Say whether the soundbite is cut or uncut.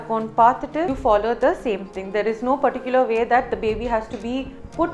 cut